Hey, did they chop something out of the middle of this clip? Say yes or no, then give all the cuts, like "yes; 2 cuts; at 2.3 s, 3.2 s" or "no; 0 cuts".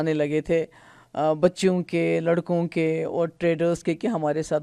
no; 0 cuts